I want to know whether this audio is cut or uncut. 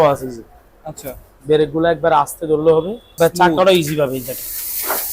cut